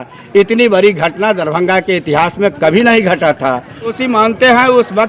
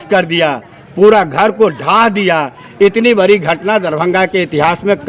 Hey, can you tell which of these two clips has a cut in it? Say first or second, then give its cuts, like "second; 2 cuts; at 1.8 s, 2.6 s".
first; 1 cut; at 4.0 s